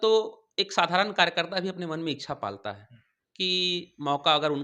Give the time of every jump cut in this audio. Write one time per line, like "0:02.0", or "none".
none